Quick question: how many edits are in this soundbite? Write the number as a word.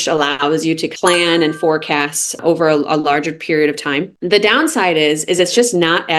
one